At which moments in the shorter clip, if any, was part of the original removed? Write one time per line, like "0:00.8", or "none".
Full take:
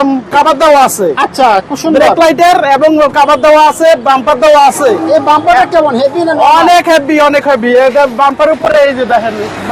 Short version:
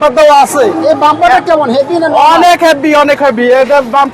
none